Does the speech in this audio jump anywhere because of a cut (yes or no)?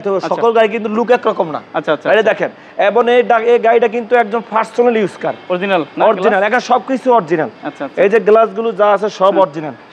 no